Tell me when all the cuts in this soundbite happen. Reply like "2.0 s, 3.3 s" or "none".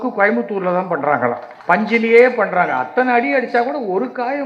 1.5 s